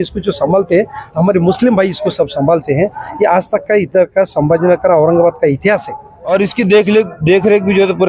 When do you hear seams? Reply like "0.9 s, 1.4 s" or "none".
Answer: 6.3 s

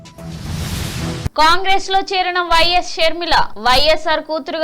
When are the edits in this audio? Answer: 1.3 s

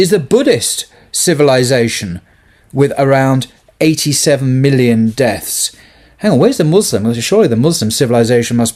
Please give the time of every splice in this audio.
none

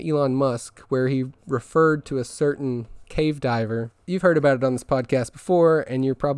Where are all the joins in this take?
3.0 s, 4.0 s

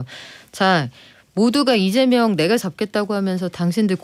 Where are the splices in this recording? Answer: none

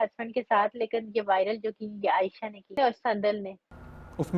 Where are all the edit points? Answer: 2.7 s

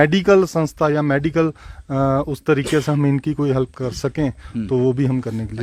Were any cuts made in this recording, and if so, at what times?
none

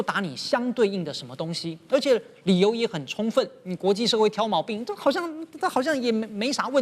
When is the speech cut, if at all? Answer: none

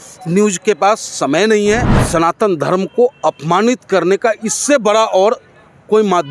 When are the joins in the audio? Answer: 1.9 s

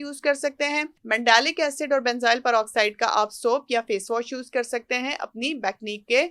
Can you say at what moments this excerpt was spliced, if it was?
0.9 s

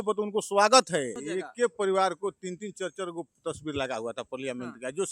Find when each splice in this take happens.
1.2 s

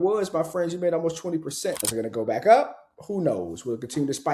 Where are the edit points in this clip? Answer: 1.8 s

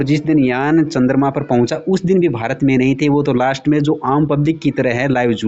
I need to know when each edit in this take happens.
none

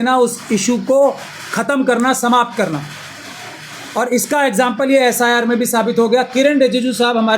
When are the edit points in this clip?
none

